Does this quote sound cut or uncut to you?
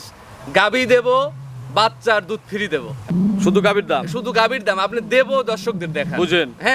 cut